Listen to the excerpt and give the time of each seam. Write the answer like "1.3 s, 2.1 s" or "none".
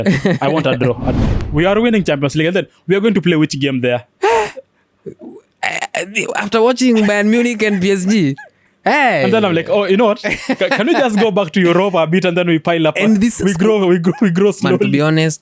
1.4 s